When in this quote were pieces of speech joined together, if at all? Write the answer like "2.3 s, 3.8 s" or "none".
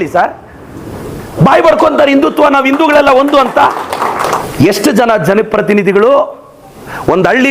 4.4 s